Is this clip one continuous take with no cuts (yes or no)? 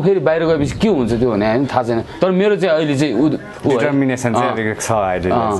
yes